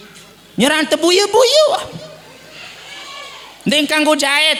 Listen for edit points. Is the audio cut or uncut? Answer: uncut